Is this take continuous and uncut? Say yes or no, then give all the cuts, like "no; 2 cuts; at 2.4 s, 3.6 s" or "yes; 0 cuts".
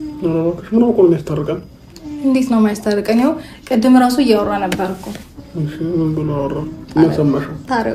yes; 0 cuts